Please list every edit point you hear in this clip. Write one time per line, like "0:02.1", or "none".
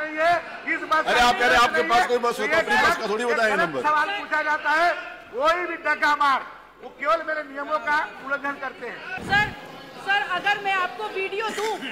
0:09.2